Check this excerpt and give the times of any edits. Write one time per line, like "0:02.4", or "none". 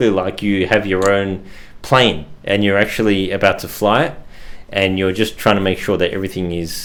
none